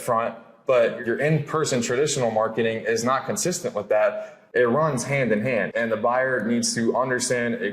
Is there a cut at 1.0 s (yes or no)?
yes